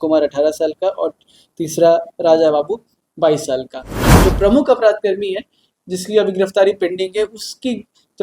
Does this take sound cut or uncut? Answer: cut